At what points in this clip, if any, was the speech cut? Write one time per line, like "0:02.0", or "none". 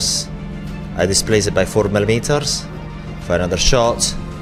none